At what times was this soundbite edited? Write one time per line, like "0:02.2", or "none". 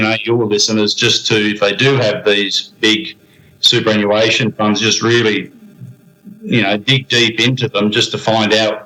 none